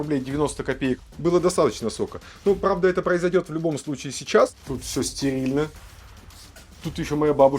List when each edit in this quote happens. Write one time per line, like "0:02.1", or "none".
0:01.1
0:04.6